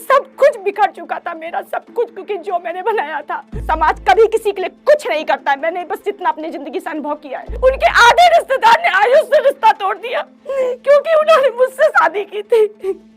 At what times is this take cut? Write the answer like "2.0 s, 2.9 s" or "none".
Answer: 3.6 s, 7.6 s